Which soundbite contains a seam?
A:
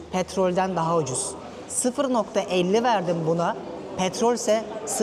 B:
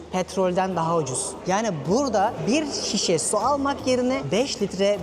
B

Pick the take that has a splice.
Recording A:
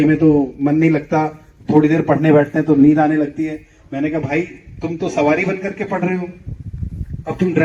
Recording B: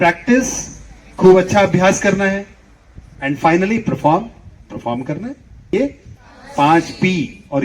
B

